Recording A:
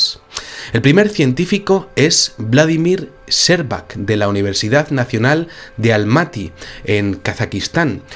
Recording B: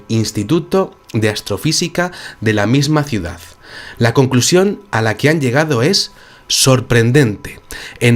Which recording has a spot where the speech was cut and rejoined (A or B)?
A